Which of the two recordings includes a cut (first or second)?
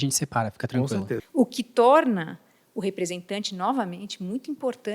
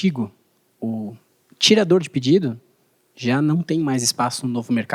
first